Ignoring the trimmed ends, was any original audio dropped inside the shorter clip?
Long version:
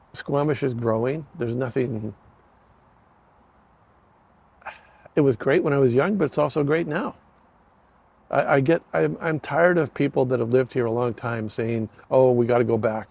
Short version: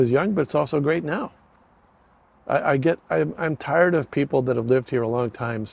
no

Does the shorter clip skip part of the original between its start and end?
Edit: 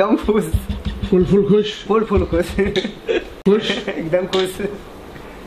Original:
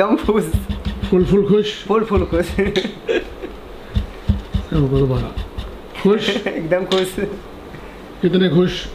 yes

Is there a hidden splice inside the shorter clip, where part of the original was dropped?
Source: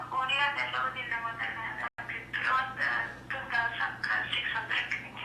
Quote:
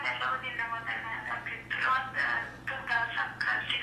yes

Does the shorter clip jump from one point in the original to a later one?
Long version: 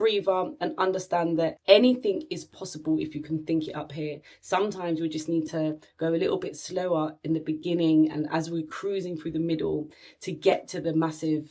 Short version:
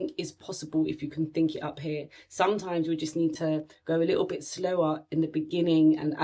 no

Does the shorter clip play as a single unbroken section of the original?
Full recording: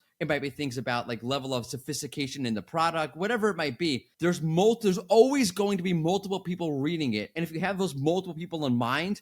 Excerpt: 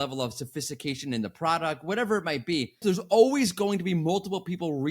no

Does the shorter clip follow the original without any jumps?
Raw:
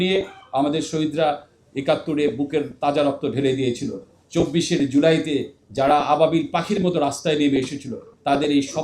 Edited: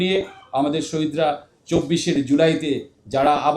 no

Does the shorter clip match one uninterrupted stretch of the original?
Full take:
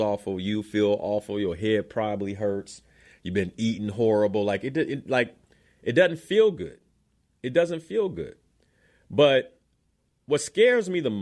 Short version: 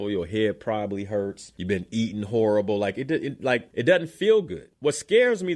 no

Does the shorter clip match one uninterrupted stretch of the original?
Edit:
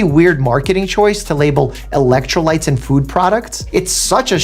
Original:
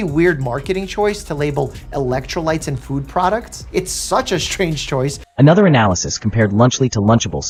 yes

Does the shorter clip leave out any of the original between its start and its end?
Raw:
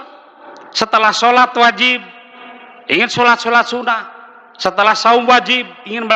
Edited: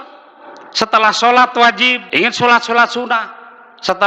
yes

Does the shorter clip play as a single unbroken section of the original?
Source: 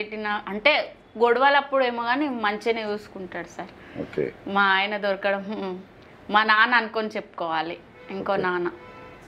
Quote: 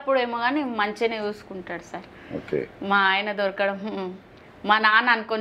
yes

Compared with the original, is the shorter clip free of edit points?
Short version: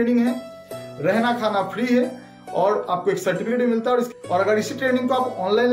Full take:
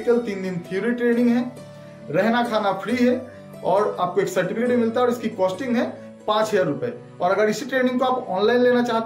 no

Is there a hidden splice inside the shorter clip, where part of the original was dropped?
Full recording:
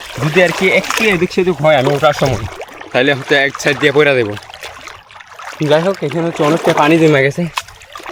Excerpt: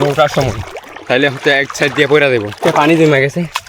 yes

